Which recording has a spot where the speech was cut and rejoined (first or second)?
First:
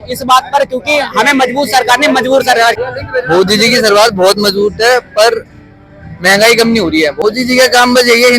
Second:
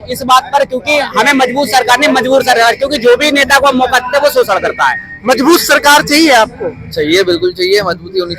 first